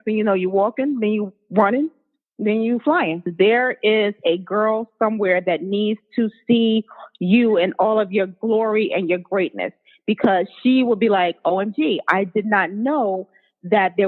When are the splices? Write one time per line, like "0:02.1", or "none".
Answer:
0:03.3